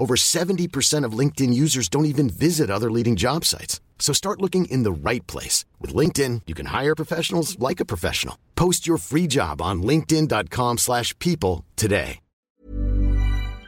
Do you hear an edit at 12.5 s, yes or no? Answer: yes